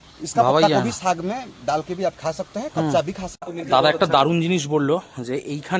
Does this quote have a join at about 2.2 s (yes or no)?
no